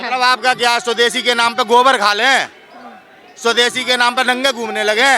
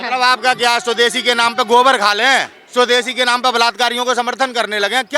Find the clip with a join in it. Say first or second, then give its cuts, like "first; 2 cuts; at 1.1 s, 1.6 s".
second; 1 cut; at 2.6 s